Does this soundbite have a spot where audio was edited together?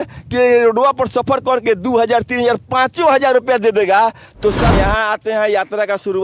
yes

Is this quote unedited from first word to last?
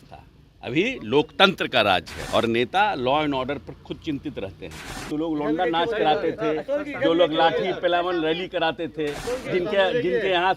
no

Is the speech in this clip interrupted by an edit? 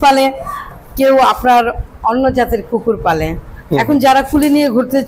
no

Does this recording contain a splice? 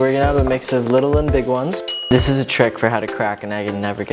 yes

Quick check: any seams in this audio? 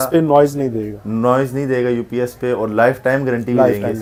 no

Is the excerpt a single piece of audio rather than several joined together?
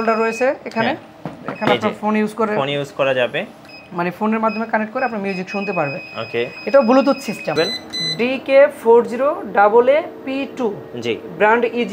no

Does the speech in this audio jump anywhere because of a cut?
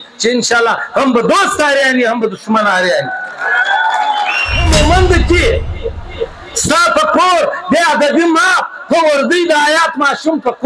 yes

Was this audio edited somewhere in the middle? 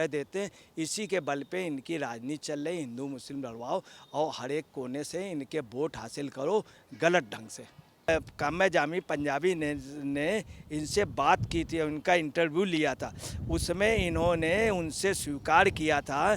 yes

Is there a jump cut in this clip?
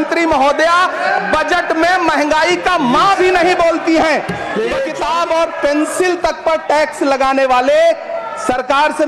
yes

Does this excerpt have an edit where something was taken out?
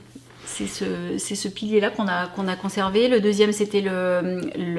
no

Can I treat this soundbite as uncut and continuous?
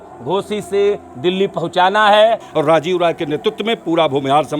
no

